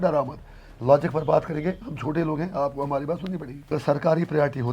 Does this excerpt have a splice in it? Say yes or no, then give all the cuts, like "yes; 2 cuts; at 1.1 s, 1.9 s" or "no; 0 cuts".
yes; 1 cut; at 3.7 s